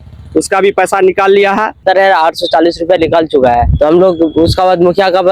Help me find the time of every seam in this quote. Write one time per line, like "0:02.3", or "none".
0:01.8